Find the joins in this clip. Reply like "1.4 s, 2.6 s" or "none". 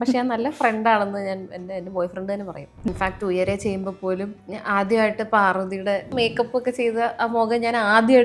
2.9 s, 4.4 s, 6.1 s